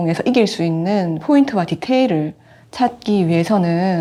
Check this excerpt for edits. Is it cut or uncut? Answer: uncut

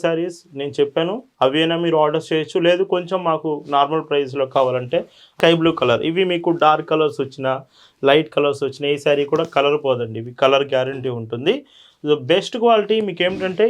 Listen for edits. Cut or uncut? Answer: cut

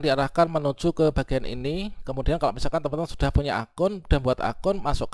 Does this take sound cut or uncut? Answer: uncut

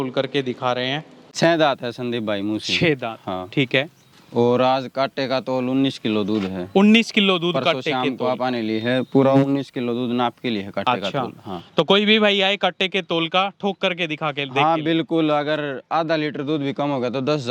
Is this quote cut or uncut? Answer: cut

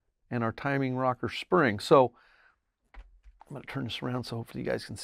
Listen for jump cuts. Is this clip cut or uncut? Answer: uncut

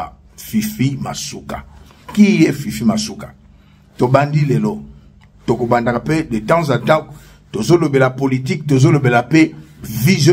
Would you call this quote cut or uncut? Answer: cut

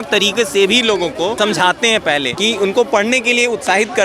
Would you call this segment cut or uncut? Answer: cut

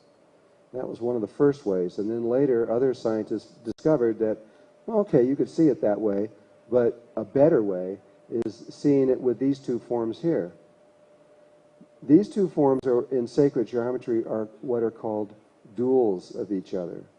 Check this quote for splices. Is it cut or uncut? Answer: uncut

